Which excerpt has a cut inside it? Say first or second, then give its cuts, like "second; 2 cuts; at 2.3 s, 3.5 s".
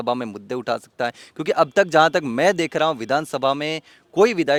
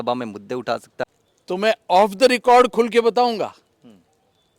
second; 1 cut; at 1.0 s